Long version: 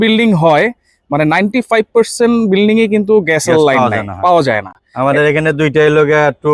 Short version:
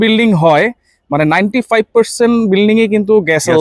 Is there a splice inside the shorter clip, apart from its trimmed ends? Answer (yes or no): no